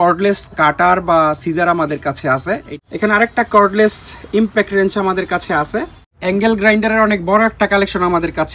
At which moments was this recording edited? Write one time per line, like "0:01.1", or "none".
0:02.7
0:06.0